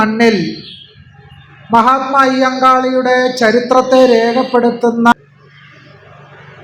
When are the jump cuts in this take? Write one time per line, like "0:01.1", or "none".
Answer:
0:05.1